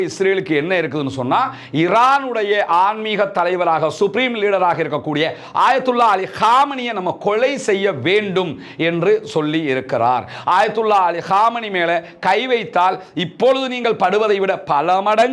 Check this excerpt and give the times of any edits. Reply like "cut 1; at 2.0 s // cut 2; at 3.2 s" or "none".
none